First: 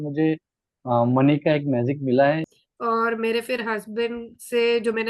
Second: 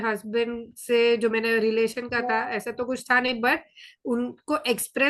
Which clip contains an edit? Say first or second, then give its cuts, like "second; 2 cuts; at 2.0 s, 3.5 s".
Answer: first; 1 cut; at 2.5 s